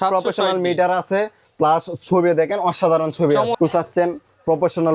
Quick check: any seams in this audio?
yes; 1 cut; at 3.5 s

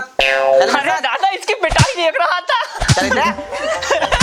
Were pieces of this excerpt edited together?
no; 0 cuts

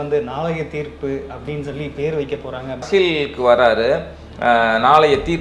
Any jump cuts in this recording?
yes; 1 cut; at 2.8 s

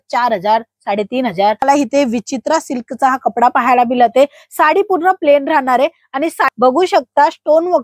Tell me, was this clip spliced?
yes; 2 cuts; at 1.6 s, 6.5 s

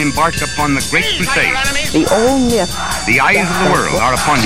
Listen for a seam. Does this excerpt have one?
no; 0 cuts

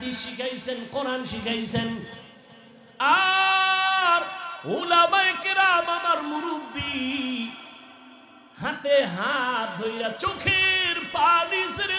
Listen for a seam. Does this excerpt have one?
no; 0 cuts

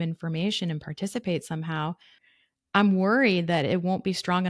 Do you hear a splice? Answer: yes; 1 cut; at 2.2 s

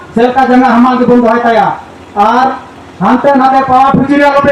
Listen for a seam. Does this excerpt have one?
no; 0 cuts

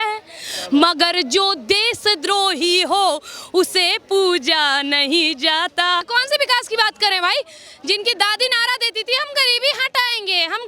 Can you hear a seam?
yes; 1 cut; at 6.1 s

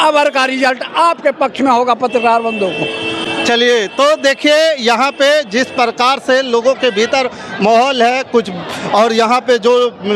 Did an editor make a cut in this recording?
no; 0 cuts

